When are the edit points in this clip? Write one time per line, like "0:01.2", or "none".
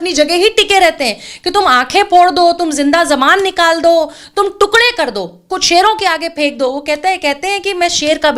none